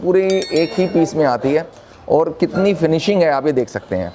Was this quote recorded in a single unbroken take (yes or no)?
yes